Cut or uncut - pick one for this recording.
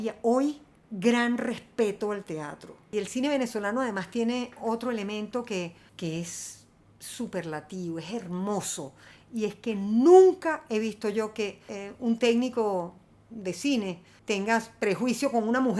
cut